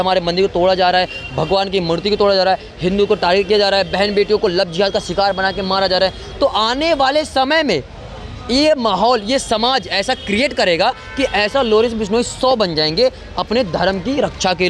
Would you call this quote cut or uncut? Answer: uncut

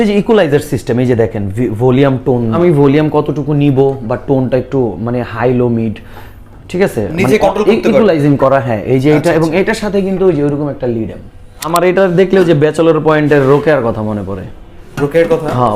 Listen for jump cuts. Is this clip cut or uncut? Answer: cut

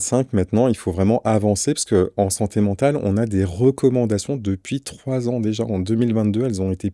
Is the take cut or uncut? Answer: uncut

